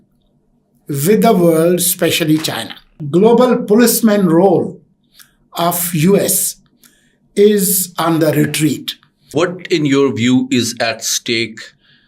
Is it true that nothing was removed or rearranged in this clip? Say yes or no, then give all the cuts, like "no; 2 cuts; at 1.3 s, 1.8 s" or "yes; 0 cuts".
no; 2 cuts; at 3.0 s, 9.3 s